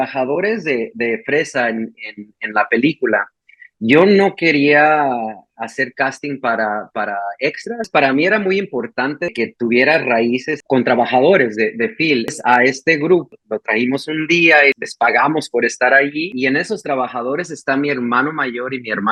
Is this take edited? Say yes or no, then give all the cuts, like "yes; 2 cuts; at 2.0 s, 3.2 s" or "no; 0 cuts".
no; 0 cuts